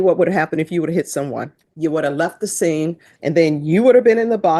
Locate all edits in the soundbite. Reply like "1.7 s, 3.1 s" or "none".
1.6 s, 3.1 s